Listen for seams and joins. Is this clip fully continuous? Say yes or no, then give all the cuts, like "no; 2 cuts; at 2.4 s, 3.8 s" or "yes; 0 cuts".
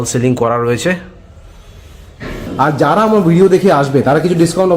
no; 1 cut; at 2.5 s